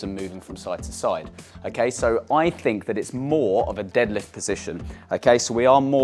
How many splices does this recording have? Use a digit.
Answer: 0